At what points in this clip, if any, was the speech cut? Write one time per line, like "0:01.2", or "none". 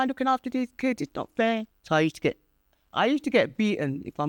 0:01.7